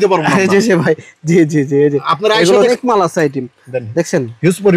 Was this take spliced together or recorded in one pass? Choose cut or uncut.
cut